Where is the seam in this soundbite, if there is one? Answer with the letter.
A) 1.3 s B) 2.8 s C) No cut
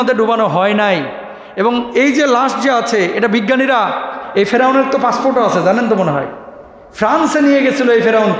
C